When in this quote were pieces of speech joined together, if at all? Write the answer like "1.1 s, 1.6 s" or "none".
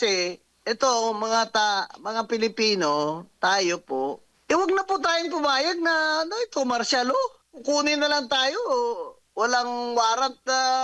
4.3 s, 7.5 s, 9.2 s